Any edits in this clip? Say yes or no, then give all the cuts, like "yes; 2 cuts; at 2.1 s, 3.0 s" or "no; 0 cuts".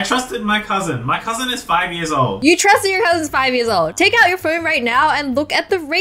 no; 0 cuts